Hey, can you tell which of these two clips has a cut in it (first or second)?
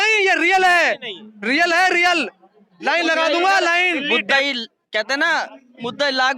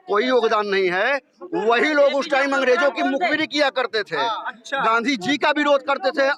first